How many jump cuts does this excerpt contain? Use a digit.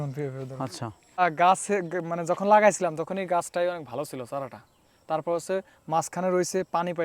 1